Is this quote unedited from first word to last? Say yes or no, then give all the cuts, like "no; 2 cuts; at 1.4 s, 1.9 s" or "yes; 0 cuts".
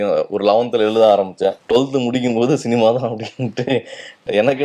no; 1 cut; at 1.6 s